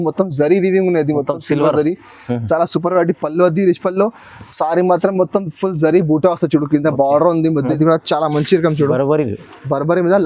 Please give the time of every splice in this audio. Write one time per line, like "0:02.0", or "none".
0:07.7